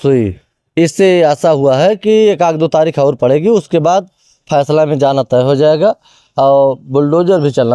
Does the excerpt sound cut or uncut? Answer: uncut